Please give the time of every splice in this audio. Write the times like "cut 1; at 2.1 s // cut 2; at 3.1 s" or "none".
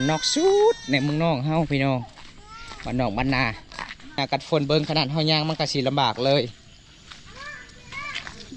cut 1; at 4.2 s